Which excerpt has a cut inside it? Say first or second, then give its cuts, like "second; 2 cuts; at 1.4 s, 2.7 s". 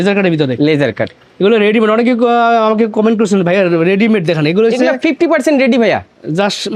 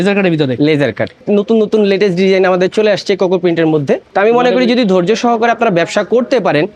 second; 2 cuts; at 1.2 s, 4.1 s